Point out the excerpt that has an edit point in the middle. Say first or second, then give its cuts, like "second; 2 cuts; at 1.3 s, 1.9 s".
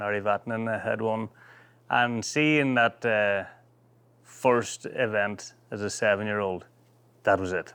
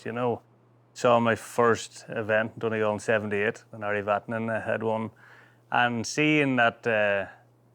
second; 1 cut; at 0.9 s